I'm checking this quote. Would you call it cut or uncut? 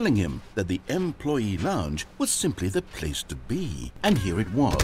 cut